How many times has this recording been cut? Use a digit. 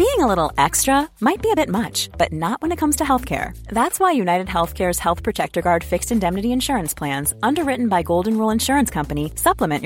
0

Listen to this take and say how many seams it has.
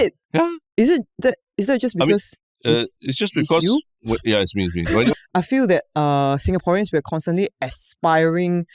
1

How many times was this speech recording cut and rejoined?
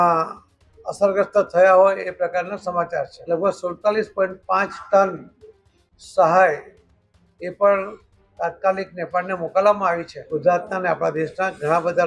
2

